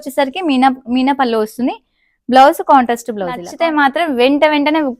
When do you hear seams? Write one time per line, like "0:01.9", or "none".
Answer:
0:03.5